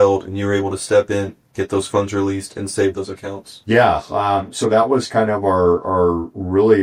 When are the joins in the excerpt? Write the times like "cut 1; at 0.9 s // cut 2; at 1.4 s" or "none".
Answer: none